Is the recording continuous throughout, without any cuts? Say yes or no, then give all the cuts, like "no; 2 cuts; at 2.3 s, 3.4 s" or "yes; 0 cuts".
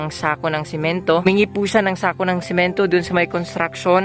no; 1 cut; at 1.3 s